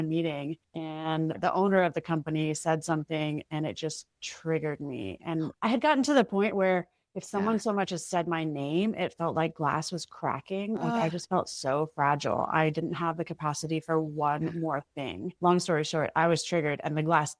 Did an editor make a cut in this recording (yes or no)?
no